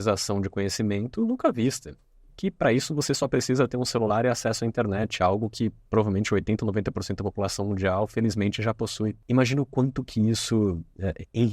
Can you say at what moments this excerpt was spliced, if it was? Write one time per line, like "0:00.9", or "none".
0:09.2

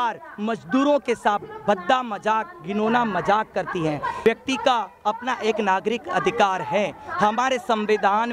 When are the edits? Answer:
0:04.2

